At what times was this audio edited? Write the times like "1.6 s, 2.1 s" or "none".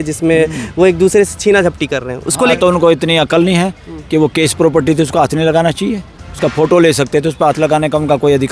2.5 s